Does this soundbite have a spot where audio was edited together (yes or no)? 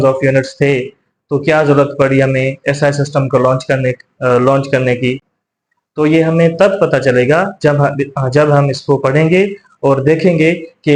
no